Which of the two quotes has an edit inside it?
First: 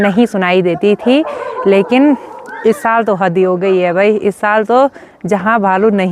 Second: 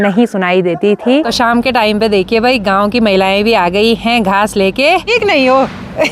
second; 2 cuts; at 1.3 s, 5.1 s

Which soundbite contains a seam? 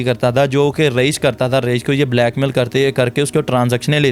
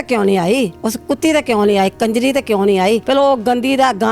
second; 1 cut; at 3.0 s

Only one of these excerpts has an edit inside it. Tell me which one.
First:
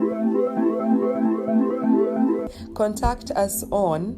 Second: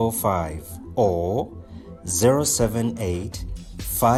first; 1 cut; at 2.4 s

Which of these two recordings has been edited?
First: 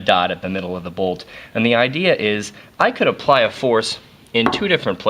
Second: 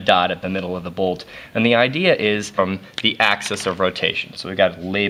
first; 1 cut; at 2.5 s

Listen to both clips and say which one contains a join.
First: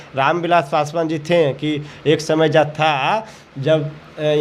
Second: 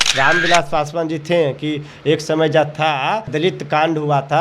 second; 1 cut; at 3.3 s

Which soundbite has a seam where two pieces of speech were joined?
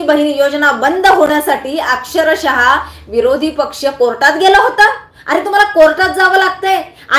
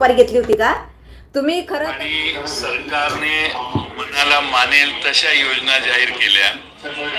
second; 1 cut; at 1.9 s

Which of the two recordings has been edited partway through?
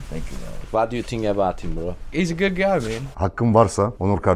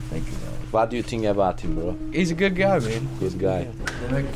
first; 1 cut; at 3.1 s

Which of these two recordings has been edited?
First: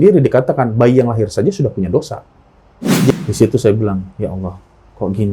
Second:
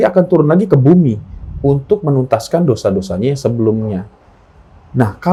first; 1 cut; at 3.1 s

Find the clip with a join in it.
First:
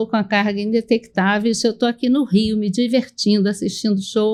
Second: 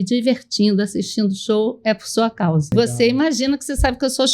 second; 1 cut; at 2.7 s

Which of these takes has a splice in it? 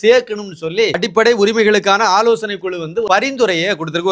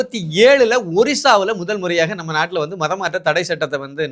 first; 2 cuts; at 1.0 s, 3.1 s

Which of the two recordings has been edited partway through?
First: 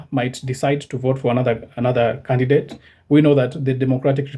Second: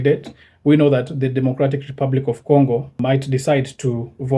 second; 1 cut; at 3.0 s

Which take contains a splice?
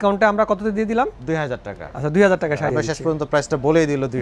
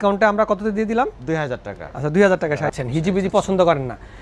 second; 1 cut; at 2.7 s

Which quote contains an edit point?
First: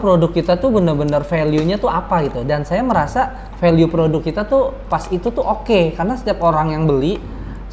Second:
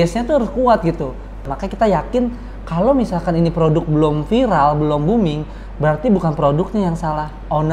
second; 1 cut; at 1.5 s

